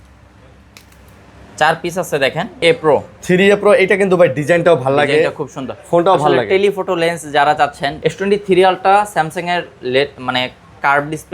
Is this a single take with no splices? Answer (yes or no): no